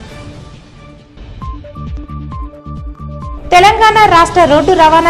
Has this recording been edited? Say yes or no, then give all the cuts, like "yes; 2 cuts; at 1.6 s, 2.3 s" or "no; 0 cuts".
yes; 1 cut; at 1.9 s